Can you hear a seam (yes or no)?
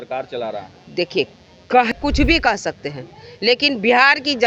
yes